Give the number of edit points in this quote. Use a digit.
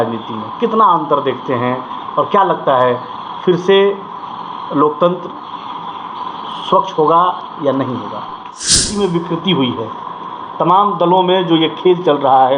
1